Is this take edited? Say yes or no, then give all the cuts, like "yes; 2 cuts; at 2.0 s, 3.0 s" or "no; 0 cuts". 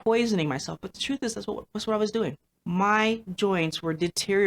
yes; 1 cut; at 2.5 s